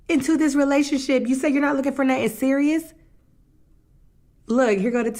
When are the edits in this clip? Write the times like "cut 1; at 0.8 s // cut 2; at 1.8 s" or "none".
none

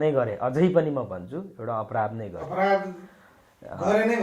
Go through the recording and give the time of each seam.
none

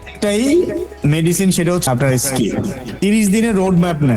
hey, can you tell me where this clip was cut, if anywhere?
cut 1; at 1.8 s // cut 2; at 2.8 s

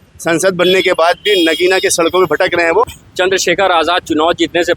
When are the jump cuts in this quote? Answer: cut 1; at 3.0 s

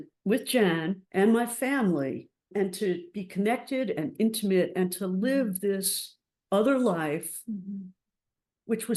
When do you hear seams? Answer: none

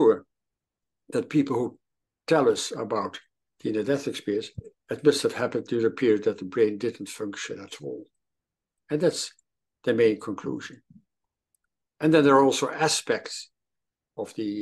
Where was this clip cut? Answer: none

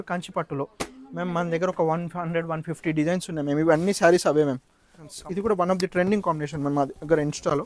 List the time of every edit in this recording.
cut 1; at 1.0 s // cut 2; at 5.1 s

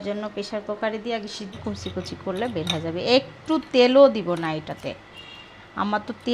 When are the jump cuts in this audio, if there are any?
cut 1; at 1.6 s

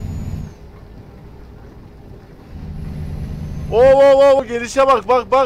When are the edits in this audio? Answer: cut 1; at 4.4 s

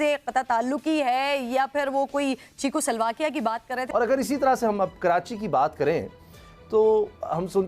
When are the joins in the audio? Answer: cut 1; at 3.8 s

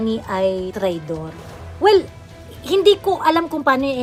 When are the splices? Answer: none

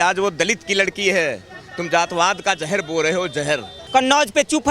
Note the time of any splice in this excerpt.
cut 1; at 3.7 s

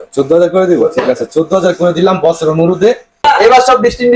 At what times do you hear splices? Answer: cut 1; at 3.2 s

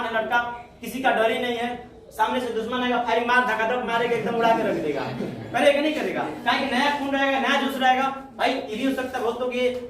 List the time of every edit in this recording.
cut 1; at 8.7 s

